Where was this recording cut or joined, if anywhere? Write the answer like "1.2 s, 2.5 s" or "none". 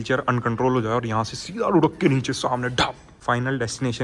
3.1 s